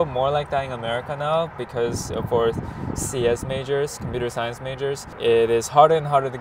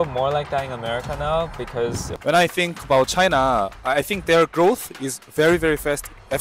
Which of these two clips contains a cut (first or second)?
second